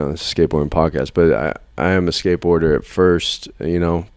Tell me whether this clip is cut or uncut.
uncut